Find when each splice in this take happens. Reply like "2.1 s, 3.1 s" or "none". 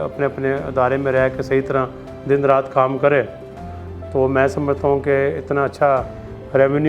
none